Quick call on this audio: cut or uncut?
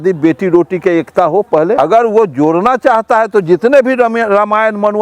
cut